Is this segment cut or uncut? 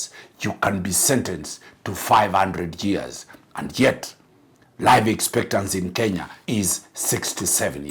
cut